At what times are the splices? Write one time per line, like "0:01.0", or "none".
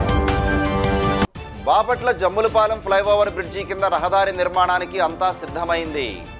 0:01.1